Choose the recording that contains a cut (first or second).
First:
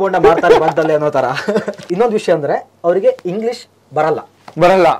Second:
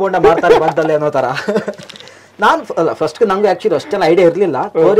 first